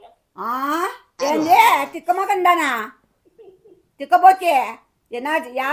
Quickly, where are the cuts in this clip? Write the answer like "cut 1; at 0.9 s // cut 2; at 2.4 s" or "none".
cut 1; at 1.0 s